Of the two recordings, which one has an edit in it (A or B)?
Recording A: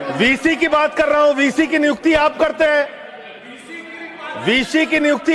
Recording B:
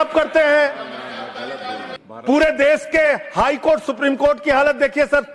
B